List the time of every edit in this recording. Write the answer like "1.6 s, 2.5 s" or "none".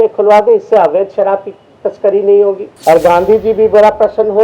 2.7 s